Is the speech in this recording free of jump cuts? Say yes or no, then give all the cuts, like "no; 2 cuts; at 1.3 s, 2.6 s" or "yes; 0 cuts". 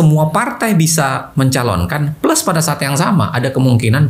yes; 0 cuts